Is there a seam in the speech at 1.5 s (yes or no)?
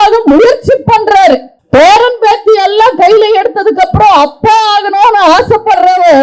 yes